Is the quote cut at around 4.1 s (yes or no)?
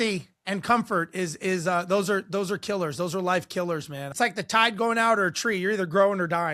yes